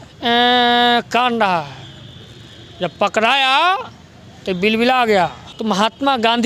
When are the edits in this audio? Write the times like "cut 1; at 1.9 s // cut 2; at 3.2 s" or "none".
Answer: cut 1; at 5.5 s